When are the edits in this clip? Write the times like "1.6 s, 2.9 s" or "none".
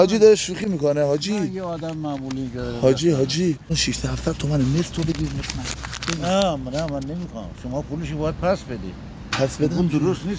3.7 s